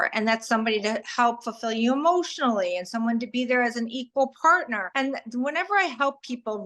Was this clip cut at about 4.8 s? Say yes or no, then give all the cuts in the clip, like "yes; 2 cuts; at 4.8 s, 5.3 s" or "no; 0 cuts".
yes; 1 cut; at 4.8 s